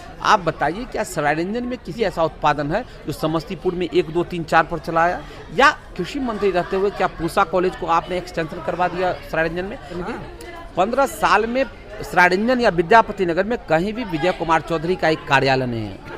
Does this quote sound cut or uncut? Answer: cut